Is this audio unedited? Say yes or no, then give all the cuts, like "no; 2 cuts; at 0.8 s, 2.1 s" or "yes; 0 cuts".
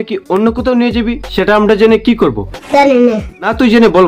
yes; 0 cuts